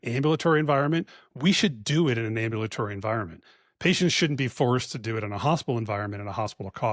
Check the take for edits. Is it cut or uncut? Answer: uncut